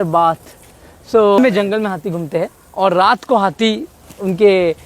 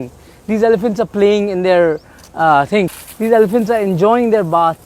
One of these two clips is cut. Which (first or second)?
first